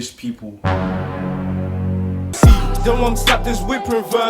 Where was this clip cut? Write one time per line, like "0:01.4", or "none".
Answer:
0:02.3